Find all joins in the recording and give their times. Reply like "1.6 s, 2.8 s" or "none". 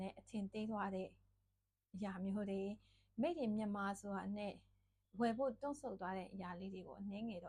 none